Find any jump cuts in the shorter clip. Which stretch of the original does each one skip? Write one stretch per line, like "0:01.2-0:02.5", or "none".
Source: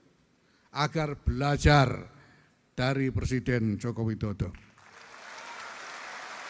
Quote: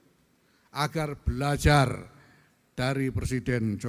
none